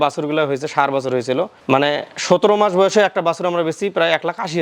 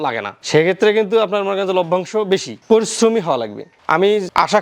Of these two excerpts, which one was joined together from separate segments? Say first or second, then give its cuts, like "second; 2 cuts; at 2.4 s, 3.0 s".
second; 1 cut; at 2.5 s